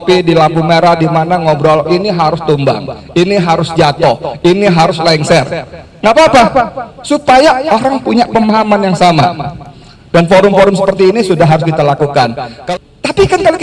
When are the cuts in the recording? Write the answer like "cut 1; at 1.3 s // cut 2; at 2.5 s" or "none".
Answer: cut 1; at 12.5 s